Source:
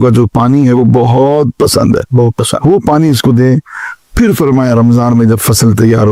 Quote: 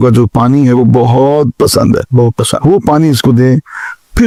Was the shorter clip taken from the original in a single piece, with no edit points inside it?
yes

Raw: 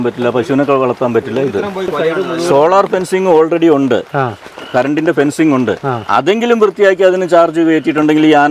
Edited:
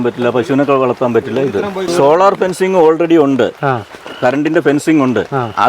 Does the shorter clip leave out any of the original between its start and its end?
yes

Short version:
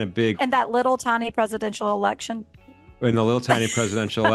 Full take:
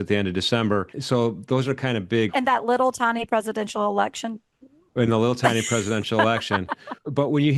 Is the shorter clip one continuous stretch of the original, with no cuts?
yes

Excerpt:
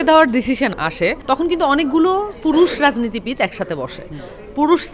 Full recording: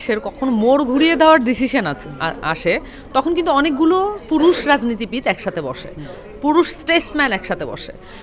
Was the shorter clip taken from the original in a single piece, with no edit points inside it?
no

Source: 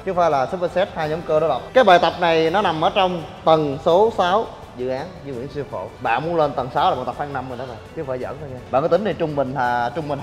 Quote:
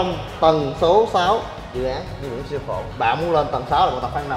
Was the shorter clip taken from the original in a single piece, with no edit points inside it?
yes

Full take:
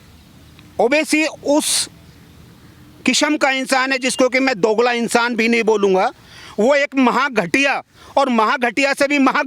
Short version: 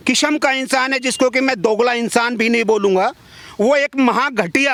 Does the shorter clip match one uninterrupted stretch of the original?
yes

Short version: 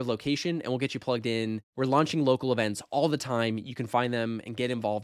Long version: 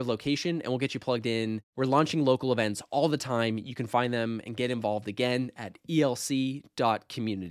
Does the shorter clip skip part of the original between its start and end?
no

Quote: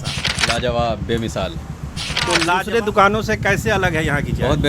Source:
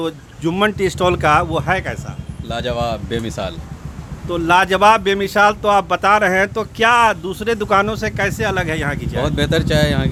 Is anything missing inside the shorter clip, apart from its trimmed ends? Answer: yes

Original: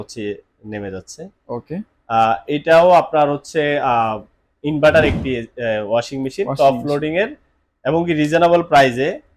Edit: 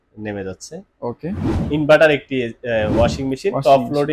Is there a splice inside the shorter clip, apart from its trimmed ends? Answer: yes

